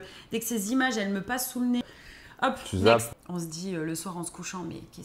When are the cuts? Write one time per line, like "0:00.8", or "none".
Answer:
0:01.8
0:03.2